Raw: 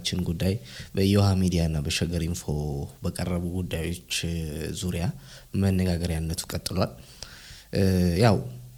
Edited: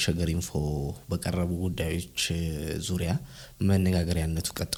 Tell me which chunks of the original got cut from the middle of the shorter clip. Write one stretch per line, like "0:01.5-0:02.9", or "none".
none